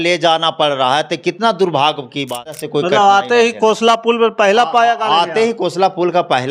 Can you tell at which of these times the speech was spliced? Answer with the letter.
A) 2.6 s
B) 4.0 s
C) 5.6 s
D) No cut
A